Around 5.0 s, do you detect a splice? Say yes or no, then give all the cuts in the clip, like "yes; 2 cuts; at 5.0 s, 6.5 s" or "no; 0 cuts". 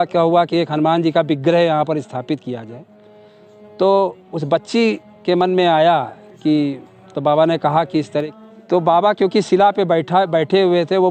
no; 1 cut; at 8.3 s